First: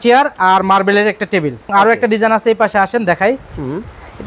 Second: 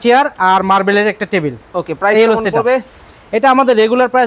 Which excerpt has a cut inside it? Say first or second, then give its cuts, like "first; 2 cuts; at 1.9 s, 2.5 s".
first; 1 cut; at 1.7 s